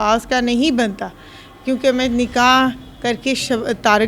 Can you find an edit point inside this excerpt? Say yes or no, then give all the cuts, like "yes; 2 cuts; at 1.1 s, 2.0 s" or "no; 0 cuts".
no; 0 cuts